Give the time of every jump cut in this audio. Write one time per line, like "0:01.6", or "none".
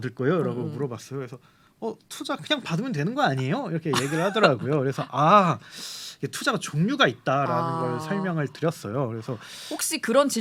none